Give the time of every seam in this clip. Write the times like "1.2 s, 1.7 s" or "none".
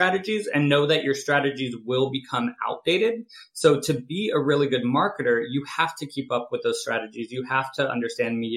none

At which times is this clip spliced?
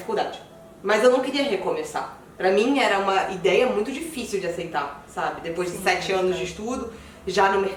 none

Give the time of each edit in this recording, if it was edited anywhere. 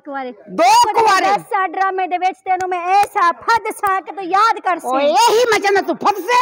none

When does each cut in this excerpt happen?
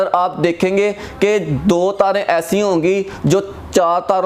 none

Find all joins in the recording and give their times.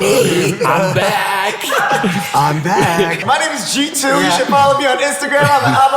3.2 s

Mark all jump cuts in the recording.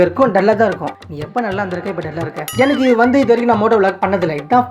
2.5 s

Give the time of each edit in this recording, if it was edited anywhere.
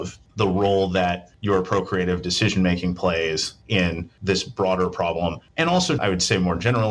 6.0 s

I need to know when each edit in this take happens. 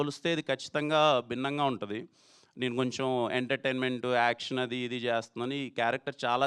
none

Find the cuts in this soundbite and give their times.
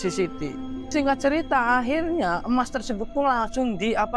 none

